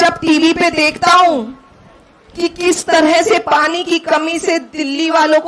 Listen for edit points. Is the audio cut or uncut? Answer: uncut